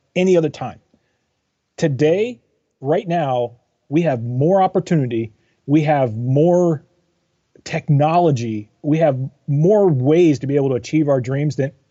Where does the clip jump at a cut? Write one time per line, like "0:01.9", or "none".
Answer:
none